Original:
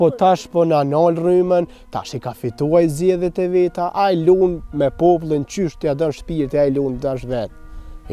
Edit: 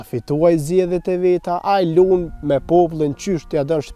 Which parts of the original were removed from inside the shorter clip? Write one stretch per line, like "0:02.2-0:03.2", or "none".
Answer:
none